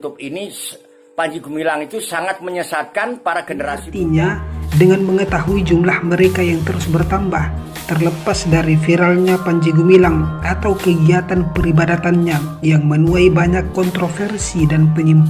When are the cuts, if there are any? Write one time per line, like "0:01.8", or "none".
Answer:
0:03.9